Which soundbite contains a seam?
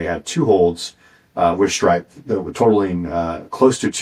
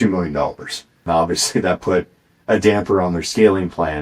second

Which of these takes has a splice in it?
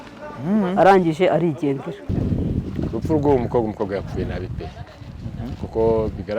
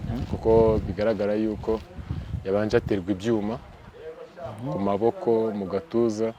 first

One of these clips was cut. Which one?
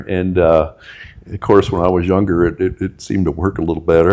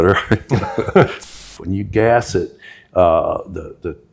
second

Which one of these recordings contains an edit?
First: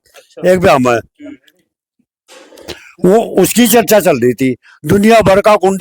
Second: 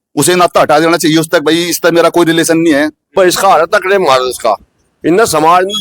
second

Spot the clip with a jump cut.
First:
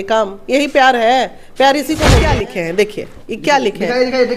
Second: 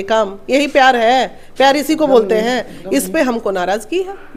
first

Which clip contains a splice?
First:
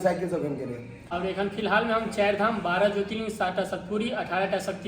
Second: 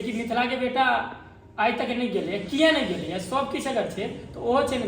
first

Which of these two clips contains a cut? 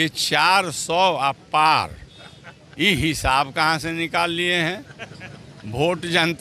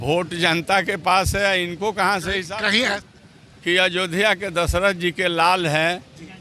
second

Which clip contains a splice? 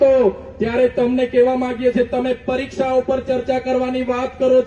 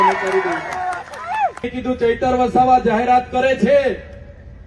second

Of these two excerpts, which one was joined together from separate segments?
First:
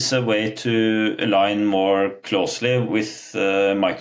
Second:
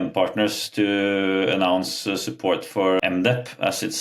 second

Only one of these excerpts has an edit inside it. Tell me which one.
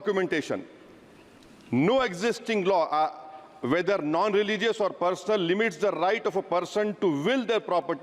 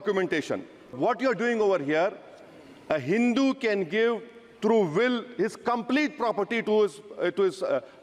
second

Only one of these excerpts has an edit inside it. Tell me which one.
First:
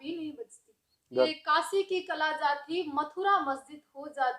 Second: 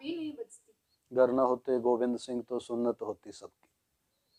first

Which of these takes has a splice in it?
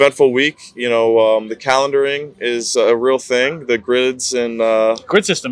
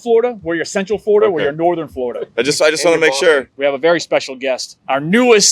second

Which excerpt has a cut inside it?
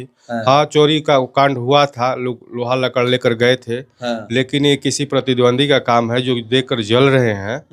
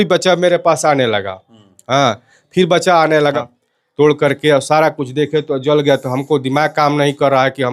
second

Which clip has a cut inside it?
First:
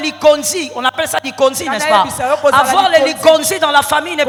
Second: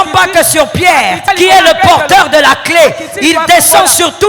second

